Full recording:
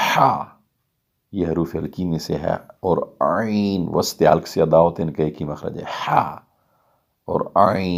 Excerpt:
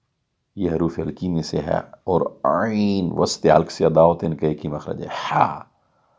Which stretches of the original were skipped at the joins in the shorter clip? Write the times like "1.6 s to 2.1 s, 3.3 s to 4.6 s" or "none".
none